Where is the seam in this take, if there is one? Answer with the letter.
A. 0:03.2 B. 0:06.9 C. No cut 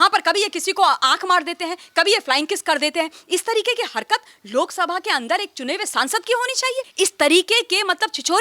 B